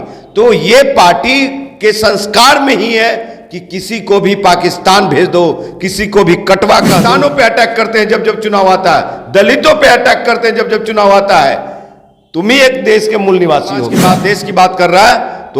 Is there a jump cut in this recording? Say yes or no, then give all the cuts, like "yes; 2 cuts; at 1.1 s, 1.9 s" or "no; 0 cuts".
yes; 2 cuts; at 7.0 s, 14.0 s